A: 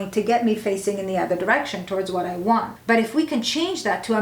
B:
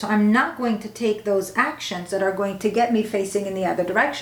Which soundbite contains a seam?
A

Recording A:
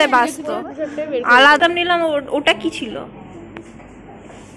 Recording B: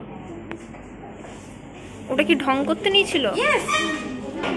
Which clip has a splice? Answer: A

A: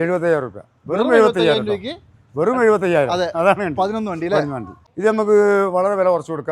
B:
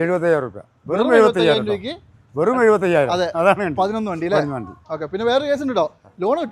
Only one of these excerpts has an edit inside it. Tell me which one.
A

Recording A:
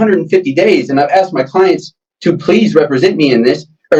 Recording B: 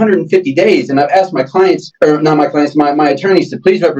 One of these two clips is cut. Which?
B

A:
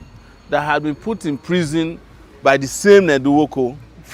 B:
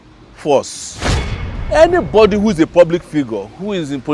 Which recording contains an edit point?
B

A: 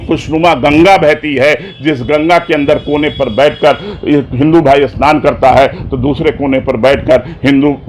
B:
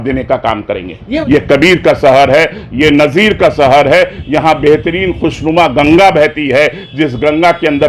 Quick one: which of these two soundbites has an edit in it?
B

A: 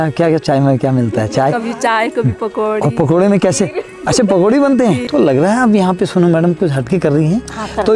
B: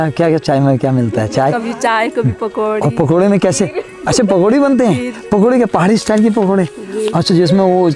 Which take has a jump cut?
A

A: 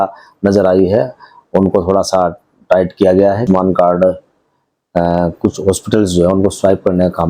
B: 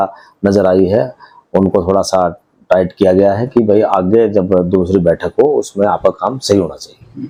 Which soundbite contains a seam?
A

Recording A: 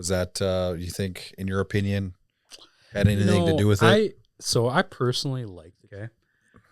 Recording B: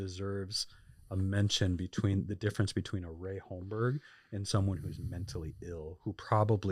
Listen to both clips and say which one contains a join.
A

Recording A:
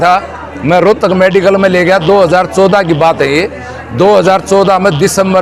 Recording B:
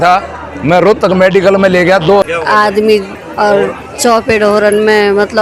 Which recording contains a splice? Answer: B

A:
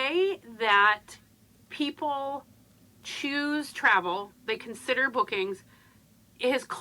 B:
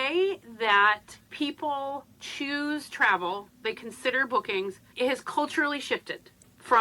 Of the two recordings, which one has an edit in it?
B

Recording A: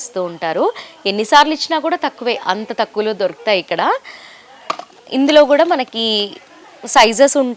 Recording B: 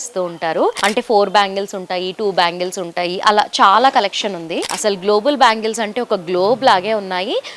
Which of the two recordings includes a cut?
B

